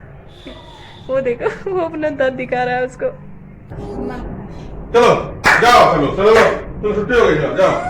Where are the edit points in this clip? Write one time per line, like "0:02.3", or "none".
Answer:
0:03.7